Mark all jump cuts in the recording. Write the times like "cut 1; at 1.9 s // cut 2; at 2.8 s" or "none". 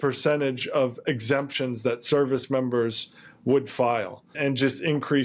cut 1; at 4.3 s